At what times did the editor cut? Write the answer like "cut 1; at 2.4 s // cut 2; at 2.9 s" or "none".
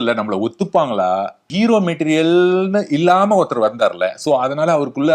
cut 1; at 1.5 s